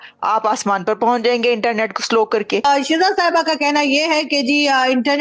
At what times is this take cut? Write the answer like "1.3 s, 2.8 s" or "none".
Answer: 2.6 s